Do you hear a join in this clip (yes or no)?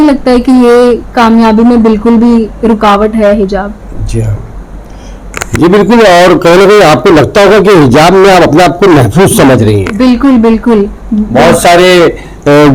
no